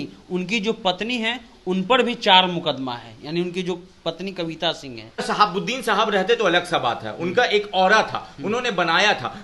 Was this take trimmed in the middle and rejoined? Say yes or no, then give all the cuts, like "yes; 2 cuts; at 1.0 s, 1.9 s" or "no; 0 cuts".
yes; 1 cut; at 5.2 s